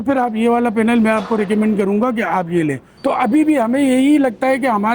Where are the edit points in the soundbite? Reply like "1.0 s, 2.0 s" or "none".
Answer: 2.9 s